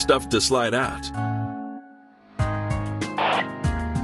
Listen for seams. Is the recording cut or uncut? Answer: cut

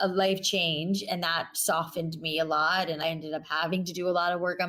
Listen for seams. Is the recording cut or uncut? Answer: cut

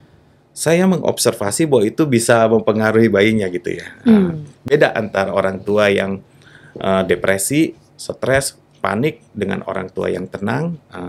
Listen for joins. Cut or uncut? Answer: uncut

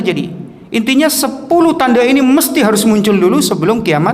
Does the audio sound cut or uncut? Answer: uncut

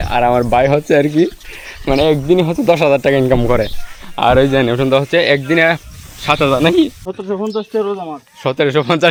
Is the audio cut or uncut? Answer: uncut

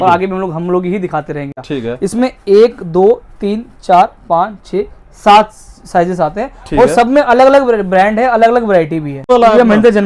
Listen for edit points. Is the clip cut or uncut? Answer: cut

